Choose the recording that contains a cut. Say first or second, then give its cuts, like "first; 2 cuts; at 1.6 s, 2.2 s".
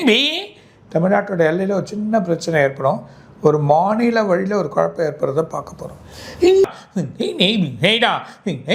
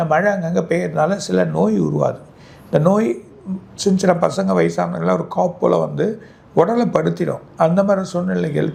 first; 1 cut; at 6.7 s